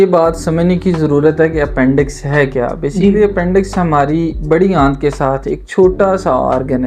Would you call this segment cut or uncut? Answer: uncut